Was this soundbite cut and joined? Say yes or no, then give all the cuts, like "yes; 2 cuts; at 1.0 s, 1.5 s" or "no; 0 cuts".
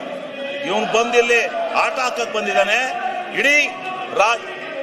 no; 0 cuts